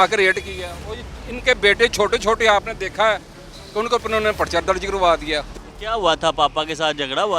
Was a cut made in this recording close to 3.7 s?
no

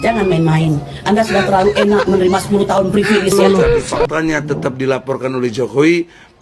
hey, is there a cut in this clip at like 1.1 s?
no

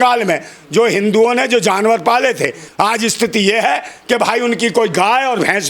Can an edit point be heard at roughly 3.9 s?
no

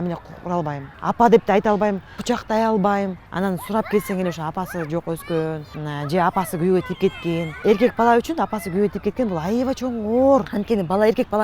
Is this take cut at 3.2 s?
yes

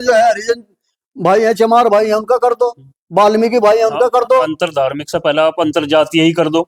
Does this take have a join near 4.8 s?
no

